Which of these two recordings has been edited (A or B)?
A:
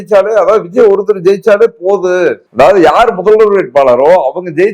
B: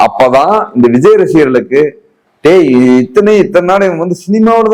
A